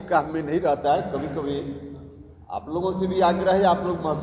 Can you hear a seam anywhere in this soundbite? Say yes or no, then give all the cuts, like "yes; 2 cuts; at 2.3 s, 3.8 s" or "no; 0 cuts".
no; 0 cuts